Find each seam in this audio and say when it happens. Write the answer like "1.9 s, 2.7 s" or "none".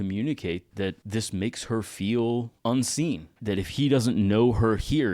1.0 s, 2.5 s